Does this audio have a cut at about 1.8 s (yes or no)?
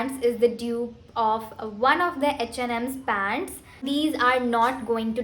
no